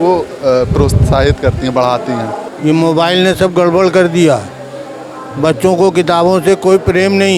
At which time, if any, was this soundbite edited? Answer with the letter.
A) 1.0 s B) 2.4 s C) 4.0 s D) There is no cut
B